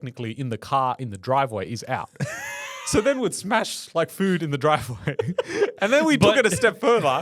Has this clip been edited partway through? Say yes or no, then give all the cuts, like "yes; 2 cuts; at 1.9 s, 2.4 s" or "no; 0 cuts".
no; 0 cuts